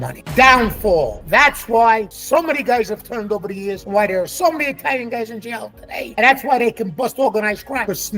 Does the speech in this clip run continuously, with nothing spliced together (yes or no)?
yes